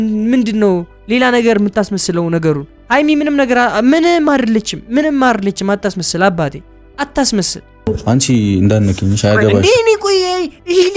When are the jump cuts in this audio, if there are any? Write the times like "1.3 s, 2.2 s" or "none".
7.9 s